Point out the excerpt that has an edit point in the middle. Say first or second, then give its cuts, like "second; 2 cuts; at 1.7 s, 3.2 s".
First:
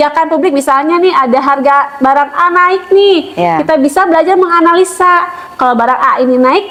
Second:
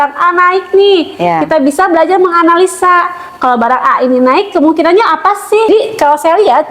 second; 1 cut; at 5.7 s